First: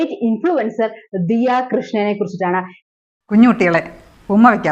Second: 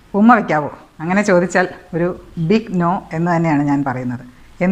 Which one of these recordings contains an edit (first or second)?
first